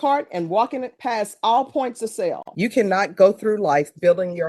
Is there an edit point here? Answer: yes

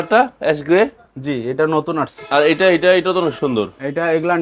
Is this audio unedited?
yes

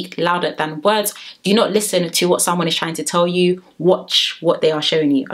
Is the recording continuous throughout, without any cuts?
yes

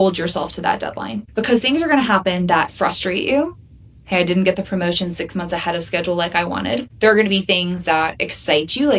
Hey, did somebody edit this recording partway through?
yes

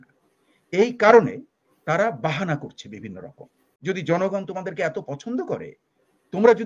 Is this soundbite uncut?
no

